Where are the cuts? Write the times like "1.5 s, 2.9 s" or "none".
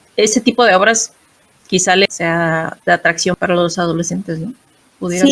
2.0 s, 3.4 s